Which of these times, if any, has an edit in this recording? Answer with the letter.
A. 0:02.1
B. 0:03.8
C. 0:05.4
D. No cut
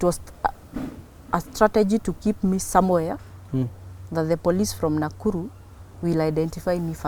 D